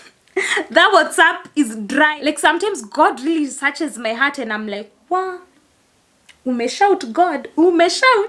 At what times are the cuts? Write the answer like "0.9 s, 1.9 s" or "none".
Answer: 2.1 s

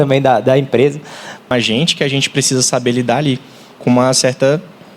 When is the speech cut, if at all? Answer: 1.5 s

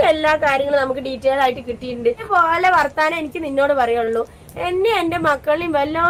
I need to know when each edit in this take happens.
none

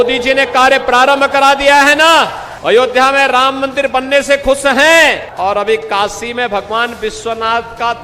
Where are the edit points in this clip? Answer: 2.5 s, 5.3 s

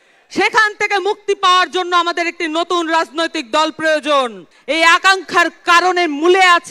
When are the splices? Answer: 4.5 s

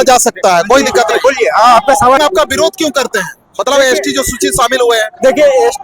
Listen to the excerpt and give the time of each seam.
2.2 s

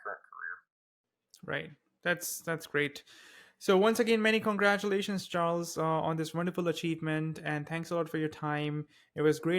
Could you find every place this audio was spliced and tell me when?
none

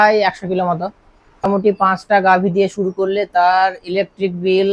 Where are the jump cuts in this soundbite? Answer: 1.4 s

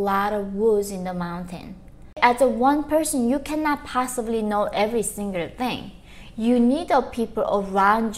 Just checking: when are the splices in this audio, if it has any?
2.2 s

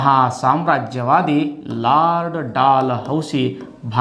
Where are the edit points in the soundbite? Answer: none

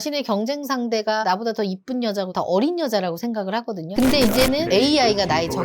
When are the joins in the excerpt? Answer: 3.9 s

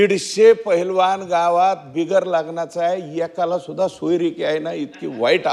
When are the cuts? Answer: none

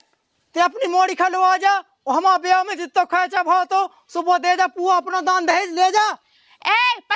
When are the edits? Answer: none

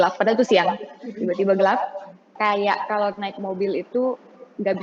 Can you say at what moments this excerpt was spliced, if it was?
2.3 s

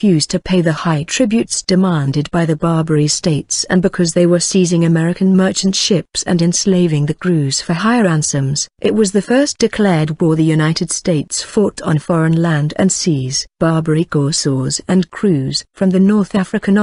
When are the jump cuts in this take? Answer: 9.5 s

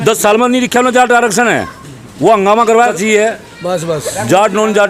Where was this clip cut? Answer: 2.9 s

